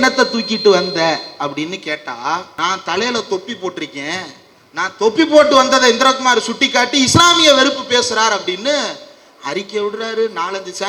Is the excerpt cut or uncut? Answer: uncut